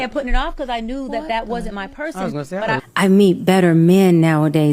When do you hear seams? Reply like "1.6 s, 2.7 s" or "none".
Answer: 2.8 s